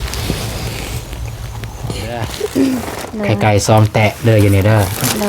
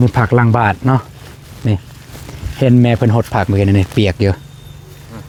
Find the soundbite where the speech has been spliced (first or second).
first